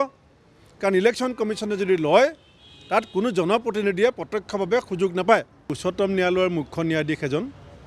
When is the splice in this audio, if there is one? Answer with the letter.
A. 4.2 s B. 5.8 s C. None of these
B